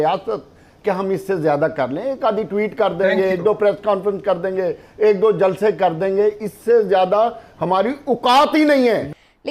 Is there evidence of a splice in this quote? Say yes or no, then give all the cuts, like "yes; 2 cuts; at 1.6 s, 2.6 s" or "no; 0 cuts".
no; 0 cuts